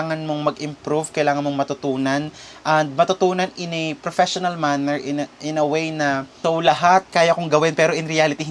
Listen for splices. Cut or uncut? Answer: cut